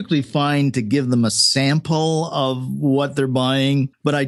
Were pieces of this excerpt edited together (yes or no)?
no